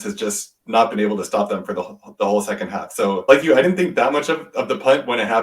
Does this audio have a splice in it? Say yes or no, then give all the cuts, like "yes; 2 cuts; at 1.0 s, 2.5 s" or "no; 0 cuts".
yes; 1 cut; at 3.2 s